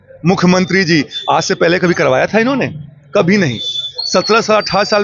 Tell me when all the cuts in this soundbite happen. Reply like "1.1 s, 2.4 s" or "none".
none